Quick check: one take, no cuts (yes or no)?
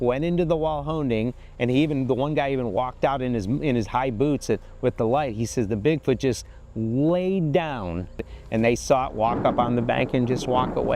no